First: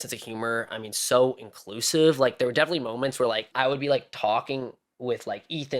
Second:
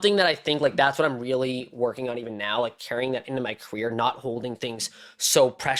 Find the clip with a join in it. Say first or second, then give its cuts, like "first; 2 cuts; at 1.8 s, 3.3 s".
first; 1 cut; at 3.5 s